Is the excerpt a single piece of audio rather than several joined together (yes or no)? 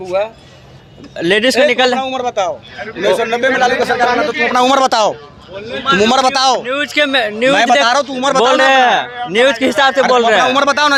yes